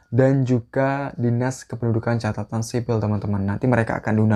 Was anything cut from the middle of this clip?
no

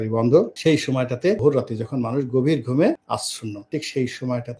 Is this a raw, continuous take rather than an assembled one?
no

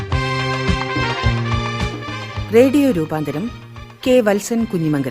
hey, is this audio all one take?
no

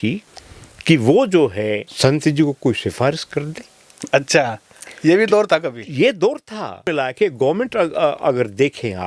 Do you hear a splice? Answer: yes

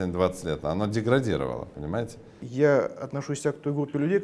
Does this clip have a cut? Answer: yes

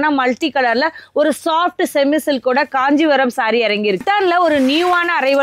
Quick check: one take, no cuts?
no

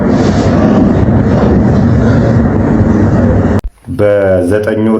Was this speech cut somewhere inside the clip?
yes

